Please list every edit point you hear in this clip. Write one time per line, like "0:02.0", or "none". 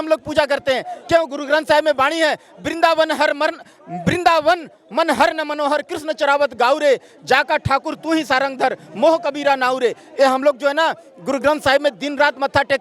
none